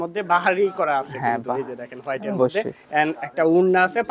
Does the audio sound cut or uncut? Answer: uncut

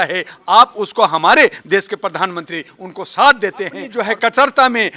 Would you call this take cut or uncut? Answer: cut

